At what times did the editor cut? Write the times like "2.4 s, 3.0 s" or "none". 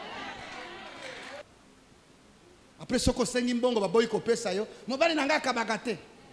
1.4 s